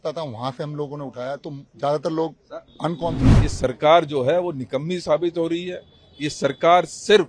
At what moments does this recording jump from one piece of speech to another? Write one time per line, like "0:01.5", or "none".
0:03.2